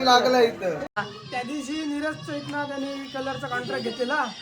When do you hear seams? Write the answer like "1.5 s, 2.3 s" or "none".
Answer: 1.0 s